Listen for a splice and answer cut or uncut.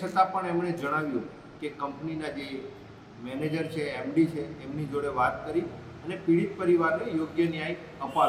uncut